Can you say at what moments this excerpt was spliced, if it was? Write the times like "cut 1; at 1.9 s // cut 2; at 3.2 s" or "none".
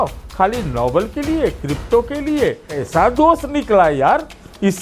cut 1; at 2.8 s